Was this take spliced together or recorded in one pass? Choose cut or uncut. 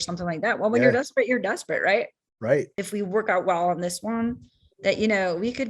cut